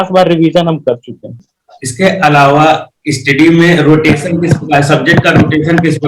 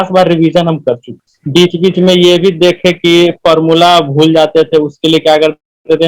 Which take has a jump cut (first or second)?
first